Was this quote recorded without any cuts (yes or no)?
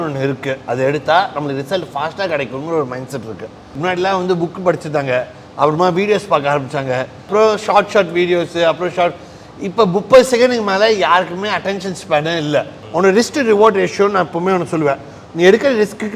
no